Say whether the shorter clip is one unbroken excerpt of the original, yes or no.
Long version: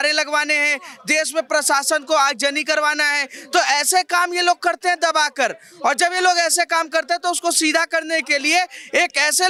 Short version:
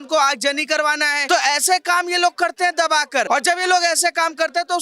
no